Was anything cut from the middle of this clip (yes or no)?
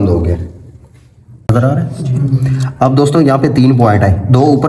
yes